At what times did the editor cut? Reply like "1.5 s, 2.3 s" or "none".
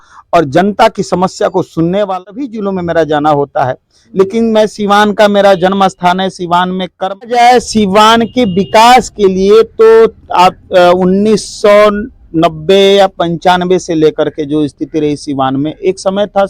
2.1 s, 7.2 s